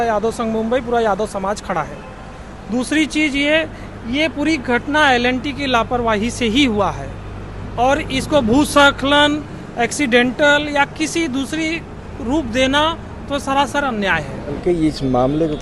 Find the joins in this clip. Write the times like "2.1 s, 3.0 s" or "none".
14.6 s

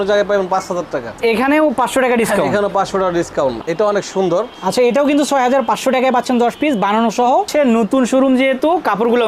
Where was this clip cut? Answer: 1.2 s, 3.6 s, 7.5 s

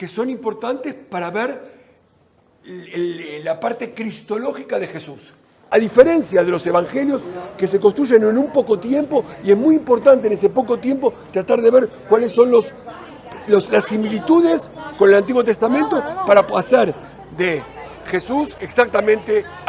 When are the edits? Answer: 5.6 s, 18.6 s

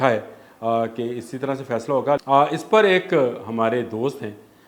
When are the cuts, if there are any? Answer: 2.2 s

